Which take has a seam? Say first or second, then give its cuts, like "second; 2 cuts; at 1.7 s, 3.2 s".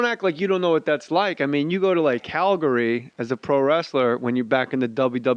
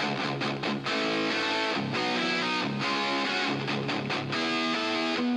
first; 1 cut; at 4.1 s